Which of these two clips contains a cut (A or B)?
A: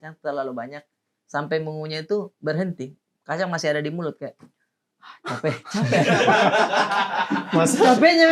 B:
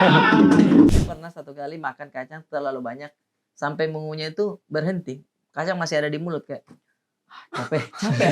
B